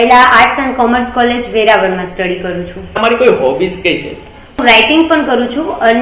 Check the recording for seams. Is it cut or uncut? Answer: cut